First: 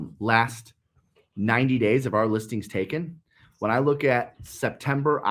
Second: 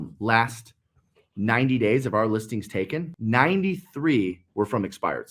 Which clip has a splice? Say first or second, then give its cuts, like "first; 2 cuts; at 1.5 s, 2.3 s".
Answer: second; 1 cut; at 3.1 s